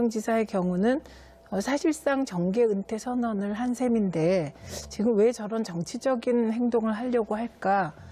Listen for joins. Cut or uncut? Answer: uncut